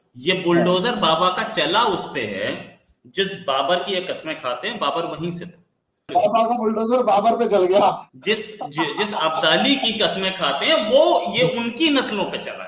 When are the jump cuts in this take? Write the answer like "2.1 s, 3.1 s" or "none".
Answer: none